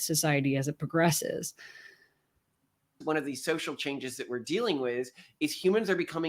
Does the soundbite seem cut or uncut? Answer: cut